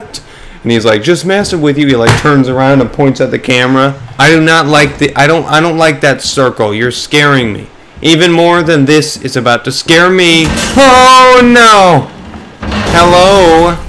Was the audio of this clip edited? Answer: yes; 1 cut; at 4.1 s

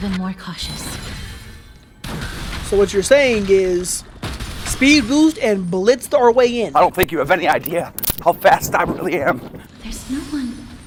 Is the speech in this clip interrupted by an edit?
no; 0 cuts

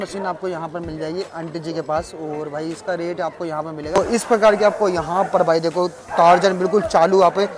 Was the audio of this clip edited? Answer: yes; 1 cut; at 3.9 s

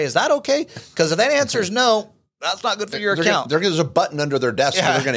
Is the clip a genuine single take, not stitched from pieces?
yes; 0 cuts

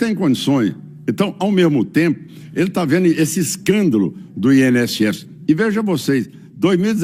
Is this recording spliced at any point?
no; 0 cuts

